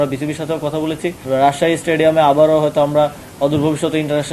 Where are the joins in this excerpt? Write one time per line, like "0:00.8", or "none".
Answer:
0:01.2

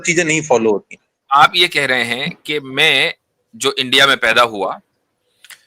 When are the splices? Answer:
0:01.1

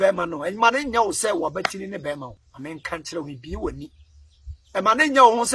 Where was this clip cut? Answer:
0:02.4

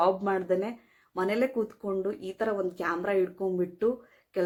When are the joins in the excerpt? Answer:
none

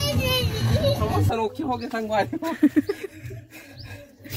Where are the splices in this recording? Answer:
0:01.2

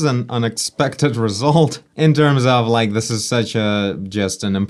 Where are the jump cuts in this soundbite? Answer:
none

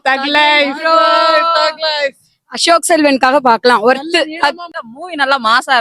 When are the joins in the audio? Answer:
0:04.7

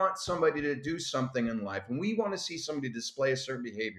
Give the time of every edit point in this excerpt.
none

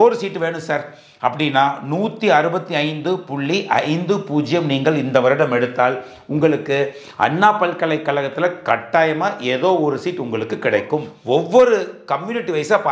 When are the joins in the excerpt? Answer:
0:11.1

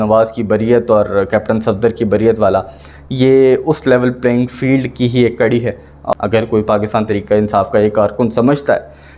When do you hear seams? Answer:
0:06.0

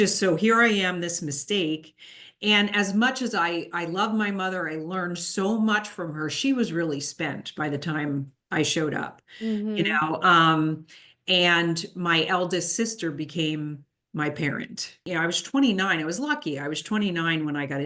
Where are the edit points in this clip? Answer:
0:15.0

